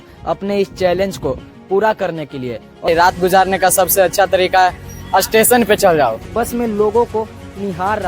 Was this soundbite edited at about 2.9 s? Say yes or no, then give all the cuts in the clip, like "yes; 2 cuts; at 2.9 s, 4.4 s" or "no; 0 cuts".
yes; 2 cuts; at 2.9 s, 6.2 s